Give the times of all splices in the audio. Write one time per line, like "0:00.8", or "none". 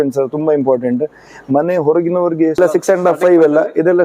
0:02.6